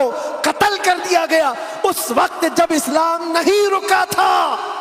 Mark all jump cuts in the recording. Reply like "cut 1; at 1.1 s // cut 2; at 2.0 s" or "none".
none

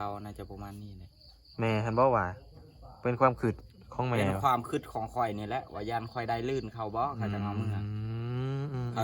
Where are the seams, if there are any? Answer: none

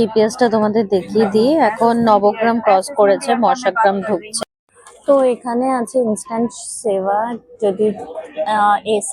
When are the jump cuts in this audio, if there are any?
cut 1; at 4.3 s

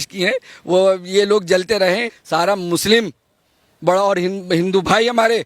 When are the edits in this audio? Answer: cut 1; at 2.2 s

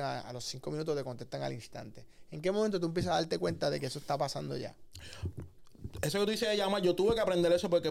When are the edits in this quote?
none

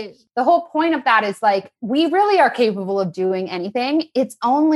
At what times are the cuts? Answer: cut 1; at 1.7 s

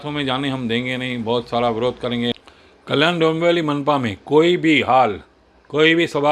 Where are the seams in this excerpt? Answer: cut 1; at 2.3 s

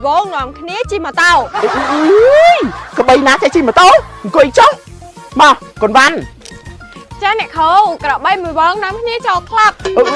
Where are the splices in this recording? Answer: none

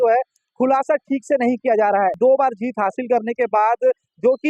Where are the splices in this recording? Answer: cut 1; at 2.2 s

